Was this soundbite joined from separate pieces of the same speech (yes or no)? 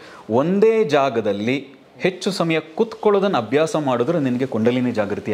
no